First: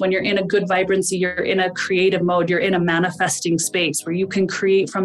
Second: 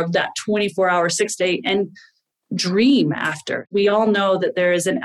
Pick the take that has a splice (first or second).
second